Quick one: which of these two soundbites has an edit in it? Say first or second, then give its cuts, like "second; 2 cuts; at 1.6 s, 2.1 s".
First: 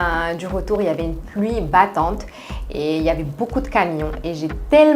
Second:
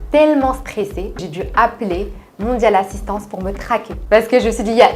second; 2 cuts; at 1.3 s, 3.9 s